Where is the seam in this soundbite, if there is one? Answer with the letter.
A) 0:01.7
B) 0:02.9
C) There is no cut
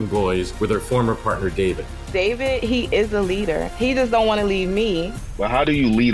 C